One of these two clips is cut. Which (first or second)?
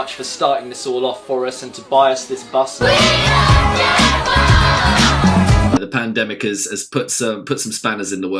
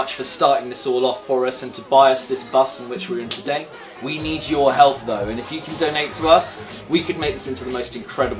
first